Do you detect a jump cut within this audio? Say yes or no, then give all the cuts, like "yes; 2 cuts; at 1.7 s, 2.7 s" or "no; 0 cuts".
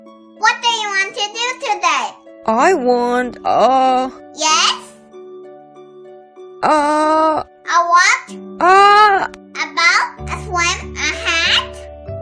no; 0 cuts